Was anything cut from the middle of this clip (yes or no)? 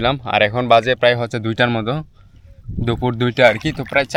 no